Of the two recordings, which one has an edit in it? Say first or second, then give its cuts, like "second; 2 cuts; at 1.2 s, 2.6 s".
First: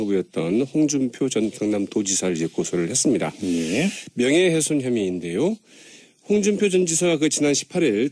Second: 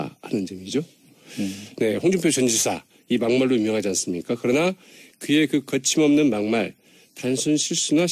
second; 1 cut; at 4.4 s